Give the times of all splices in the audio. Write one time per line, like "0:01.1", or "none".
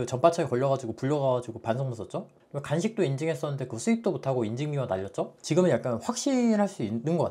0:05.4

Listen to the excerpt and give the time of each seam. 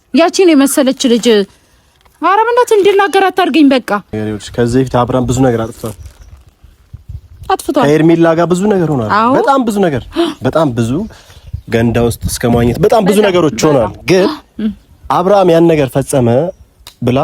0:04.1

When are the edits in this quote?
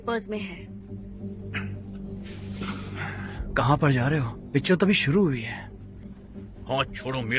none

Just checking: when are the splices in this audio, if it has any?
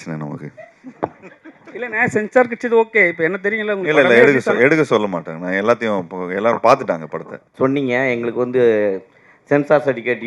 0:07.5

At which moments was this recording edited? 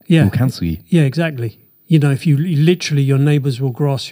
none

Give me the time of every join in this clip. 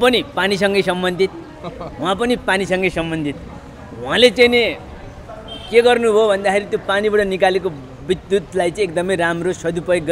none

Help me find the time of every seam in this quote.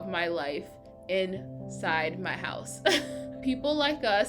0:03.4

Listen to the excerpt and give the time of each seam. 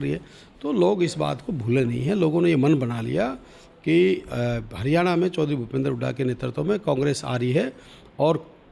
none

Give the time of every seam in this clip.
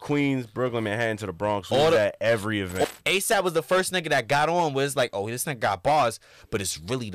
0:02.8

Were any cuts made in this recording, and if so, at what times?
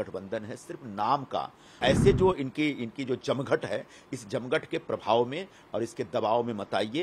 0:01.8

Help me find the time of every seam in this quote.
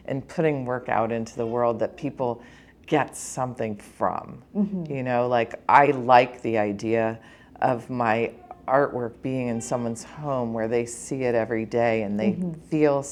none

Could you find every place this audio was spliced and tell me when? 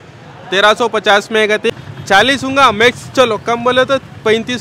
0:01.8

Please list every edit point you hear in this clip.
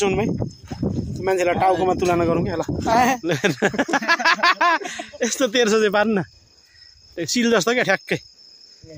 0:03.2

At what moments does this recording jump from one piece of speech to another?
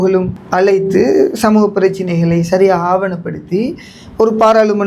none

